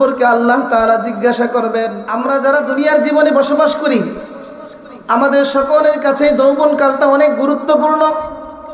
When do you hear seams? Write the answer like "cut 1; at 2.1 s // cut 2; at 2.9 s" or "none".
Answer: cut 1; at 2.0 s